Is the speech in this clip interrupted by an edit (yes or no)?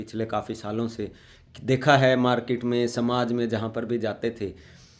no